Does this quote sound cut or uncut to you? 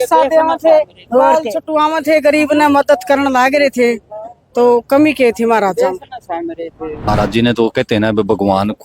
cut